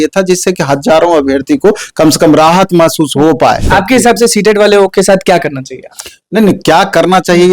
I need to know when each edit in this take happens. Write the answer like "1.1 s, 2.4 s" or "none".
3.7 s

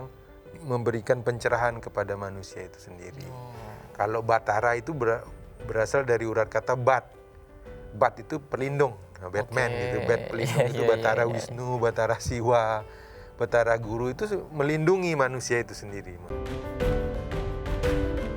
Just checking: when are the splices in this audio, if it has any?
16.3 s

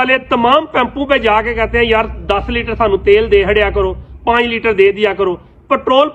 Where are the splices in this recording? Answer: none

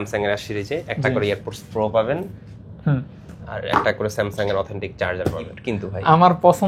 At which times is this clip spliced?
5.5 s

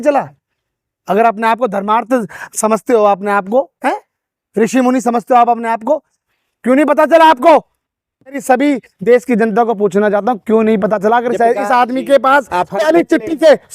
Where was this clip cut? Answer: 8.4 s

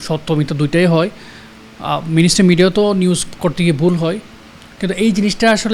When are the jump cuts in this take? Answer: none

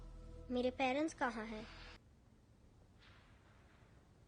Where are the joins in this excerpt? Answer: 2.0 s

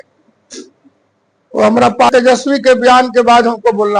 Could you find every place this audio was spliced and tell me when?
2.1 s

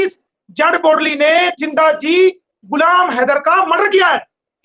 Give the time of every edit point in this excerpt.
none

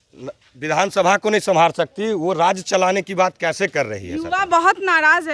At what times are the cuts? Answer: none

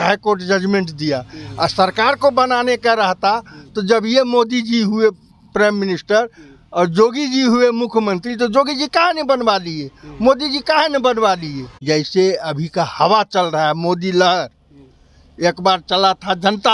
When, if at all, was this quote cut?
11.8 s

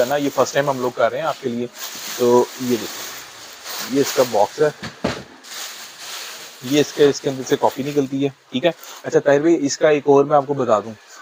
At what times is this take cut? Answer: none

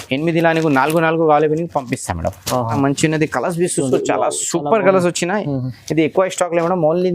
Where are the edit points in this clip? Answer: 2.8 s

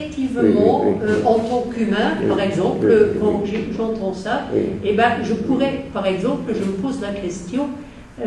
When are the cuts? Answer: 4.1 s

